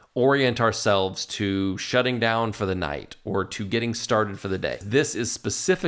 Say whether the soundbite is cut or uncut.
cut